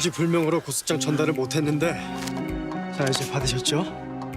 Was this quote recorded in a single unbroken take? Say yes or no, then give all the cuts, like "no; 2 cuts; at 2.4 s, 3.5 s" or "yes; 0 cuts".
no; 1 cut; at 2.1 s